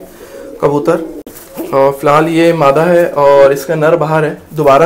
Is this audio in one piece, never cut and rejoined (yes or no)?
yes